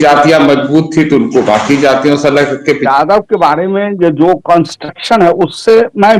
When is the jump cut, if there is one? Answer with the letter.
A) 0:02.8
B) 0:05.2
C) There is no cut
A